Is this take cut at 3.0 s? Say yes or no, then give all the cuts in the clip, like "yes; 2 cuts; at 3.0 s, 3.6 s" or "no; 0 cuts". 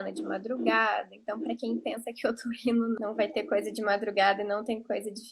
yes; 1 cut; at 3.0 s